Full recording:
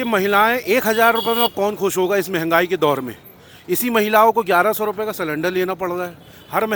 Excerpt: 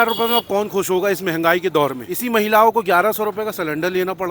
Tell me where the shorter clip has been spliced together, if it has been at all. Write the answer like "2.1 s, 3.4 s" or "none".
2.1 s